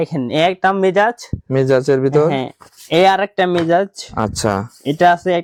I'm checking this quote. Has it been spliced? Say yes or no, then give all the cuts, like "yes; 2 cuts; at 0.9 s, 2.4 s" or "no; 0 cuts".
no; 0 cuts